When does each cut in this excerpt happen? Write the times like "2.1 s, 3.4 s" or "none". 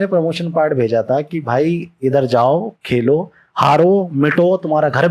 none